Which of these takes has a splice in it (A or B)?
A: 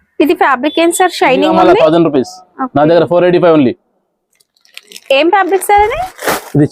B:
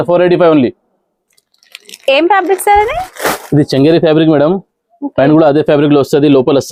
A